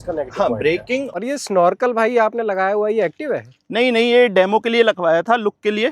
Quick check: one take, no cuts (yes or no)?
no